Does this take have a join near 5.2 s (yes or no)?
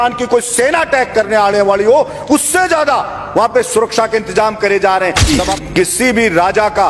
yes